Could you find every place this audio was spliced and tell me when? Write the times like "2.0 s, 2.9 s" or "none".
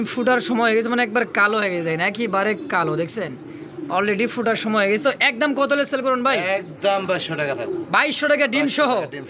none

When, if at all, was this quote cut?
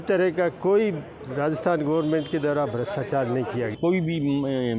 3.8 s

